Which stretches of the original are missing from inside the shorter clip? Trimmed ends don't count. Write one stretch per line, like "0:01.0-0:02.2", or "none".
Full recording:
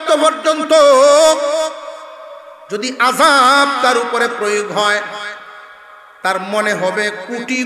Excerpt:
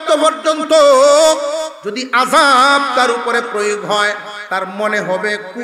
0:01.8-0:02.6
0:05.2-0:06.1